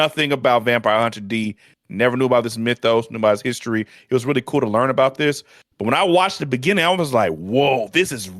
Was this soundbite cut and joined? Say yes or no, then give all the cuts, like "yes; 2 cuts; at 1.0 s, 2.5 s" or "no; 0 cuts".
no; 0 cuts